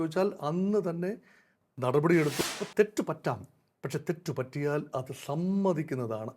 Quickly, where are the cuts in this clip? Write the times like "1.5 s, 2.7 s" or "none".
2.3 s